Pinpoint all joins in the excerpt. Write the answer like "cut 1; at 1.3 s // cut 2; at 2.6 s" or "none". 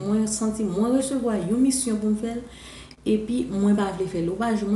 none